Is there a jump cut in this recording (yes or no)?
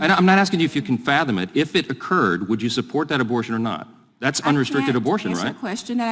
no